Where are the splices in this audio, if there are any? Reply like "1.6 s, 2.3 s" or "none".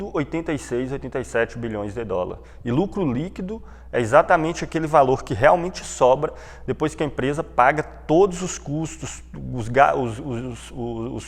none